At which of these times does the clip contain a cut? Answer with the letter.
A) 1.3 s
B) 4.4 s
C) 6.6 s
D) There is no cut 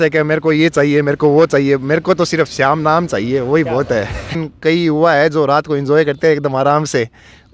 B